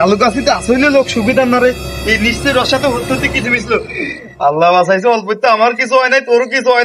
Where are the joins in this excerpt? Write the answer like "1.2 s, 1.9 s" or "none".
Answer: none